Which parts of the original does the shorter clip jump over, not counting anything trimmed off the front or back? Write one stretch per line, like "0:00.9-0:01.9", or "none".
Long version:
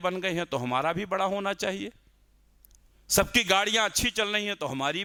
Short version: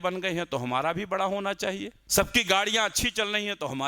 0:02.0-0:03.0

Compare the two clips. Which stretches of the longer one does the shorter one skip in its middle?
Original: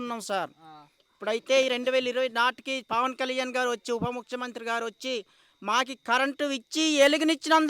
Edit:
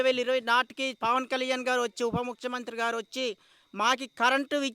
none

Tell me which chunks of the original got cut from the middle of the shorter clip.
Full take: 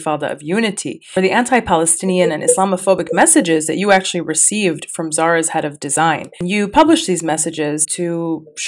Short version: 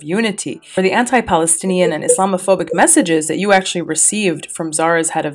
none

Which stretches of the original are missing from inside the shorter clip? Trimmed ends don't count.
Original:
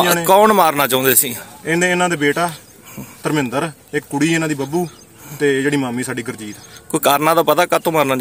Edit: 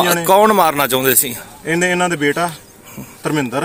none

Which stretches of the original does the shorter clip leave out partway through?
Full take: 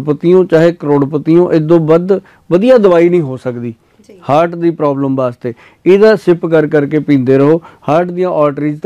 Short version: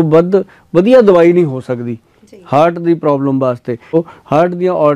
0:05.7-0:07.5

